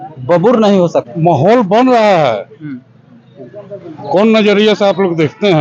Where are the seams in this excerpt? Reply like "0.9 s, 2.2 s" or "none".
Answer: 1.1 s